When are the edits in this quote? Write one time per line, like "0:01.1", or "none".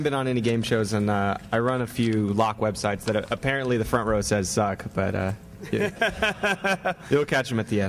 none